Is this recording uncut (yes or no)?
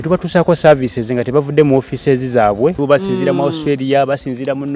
no